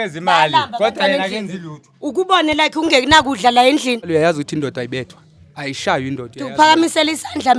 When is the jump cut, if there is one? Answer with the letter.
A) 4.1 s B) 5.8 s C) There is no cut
A